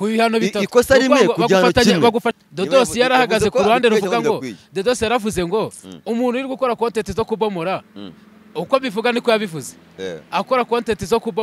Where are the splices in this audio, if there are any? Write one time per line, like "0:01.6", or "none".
0:02.4